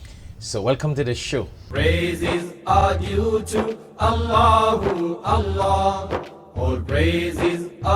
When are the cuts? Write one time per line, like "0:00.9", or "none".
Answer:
0:01.6